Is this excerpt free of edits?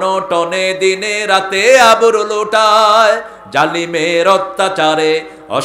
yes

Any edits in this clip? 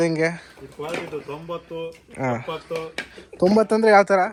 no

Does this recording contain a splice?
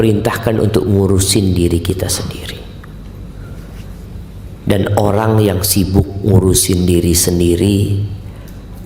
no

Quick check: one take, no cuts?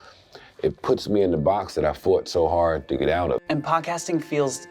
no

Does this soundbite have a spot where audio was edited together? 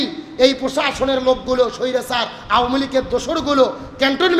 no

